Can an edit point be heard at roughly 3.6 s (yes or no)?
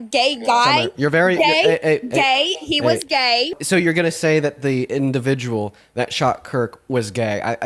yes